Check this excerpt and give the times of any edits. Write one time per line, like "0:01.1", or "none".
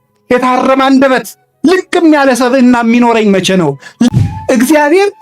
0:04.1